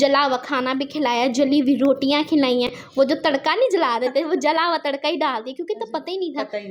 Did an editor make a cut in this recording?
no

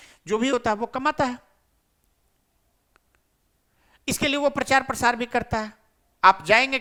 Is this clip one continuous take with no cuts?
yes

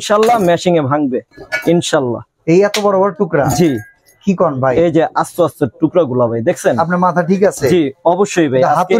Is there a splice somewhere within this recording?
no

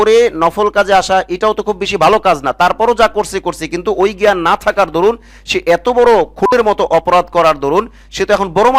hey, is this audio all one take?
yes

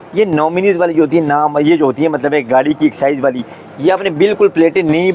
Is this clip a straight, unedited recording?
yes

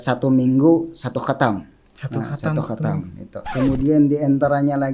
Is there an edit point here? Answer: yes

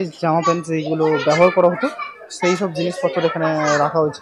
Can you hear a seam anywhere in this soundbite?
no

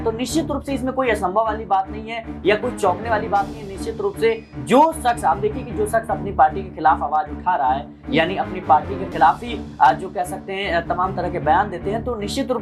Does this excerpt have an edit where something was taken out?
no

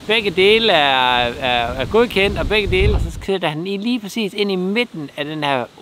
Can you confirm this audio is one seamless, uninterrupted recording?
no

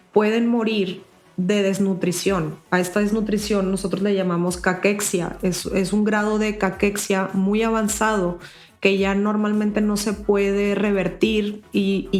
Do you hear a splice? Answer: no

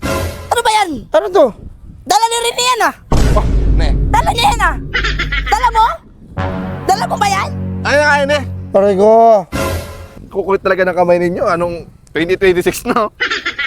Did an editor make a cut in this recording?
yes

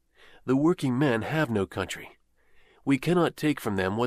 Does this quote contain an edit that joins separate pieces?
no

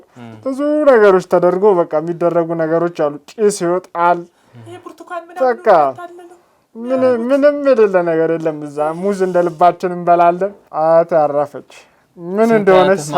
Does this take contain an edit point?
yes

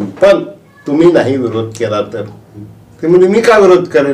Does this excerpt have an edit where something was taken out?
no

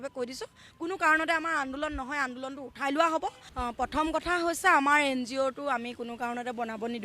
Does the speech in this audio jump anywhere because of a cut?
yes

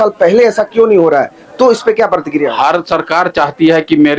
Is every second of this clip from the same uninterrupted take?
yes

